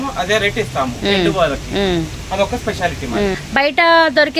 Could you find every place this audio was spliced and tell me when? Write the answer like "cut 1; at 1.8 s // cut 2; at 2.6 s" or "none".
cut 1; at 3.4 s

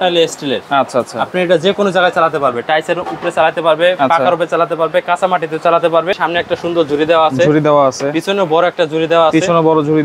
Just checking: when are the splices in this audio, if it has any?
cut 1; at 6.2 s

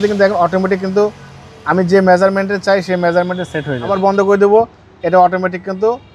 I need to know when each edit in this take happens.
cut 1; at 3.9 s

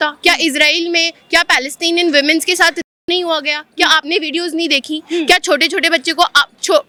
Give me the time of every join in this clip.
none

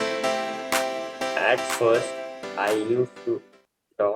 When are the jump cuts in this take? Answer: cut 1; at 1.3 s

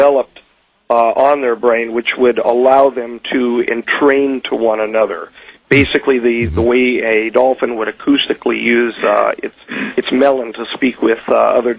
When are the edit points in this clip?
cut 1; at 9.0 s

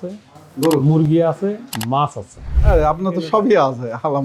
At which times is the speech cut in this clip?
none

